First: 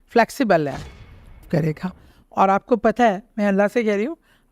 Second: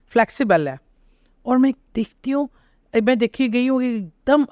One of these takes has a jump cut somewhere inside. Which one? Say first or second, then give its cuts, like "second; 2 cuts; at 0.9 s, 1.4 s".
first; 1 cut; at 1.4 s